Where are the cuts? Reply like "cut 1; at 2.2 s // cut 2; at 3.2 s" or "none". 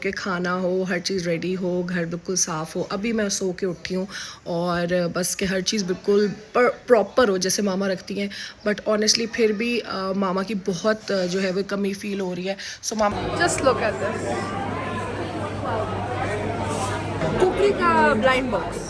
cut 1; at 13.1 s // cut 2; at 17.2 s